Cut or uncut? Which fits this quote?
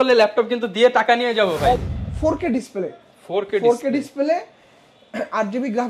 cut